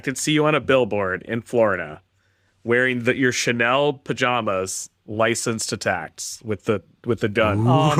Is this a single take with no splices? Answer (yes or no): yes